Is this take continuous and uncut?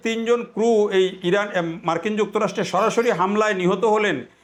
yes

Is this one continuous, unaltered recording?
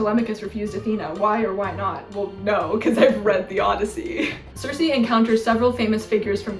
yes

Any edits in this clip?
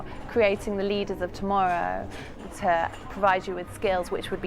yes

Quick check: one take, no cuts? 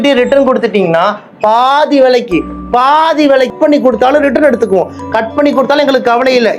no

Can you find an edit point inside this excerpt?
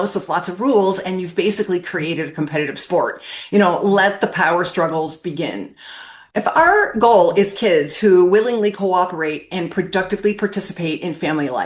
no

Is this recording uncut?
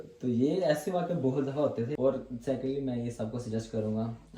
no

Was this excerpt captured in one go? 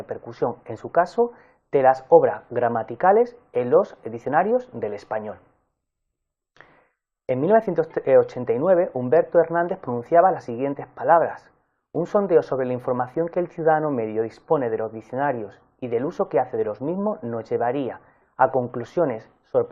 no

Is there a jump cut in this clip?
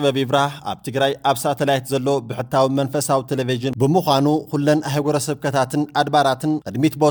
no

